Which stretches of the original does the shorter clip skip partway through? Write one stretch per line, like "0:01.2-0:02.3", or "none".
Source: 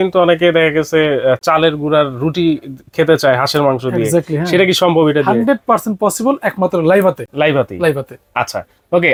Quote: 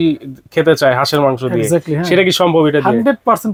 none